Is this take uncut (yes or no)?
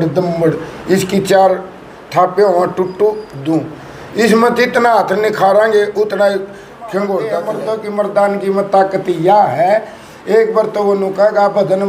no